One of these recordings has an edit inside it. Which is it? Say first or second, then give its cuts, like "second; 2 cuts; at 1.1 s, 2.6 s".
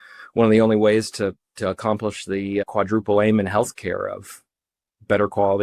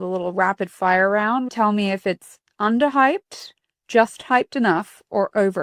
second; 1 cut; at 1.5 s